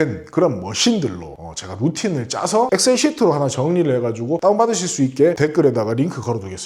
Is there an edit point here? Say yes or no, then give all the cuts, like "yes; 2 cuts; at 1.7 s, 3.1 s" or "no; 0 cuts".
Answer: no; 0 cuts